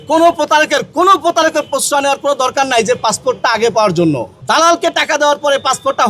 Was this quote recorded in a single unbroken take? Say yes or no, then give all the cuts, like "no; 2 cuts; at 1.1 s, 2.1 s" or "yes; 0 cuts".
no; 1 cut; at 4.3 s